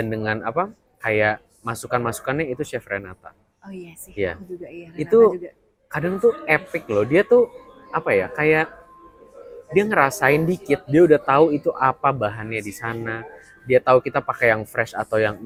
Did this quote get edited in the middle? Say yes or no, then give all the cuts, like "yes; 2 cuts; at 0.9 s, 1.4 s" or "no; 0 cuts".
no; 0 cuts